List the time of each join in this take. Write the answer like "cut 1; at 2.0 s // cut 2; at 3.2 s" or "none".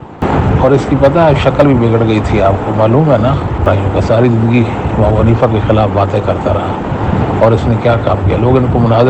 cut 1; at 3.6 s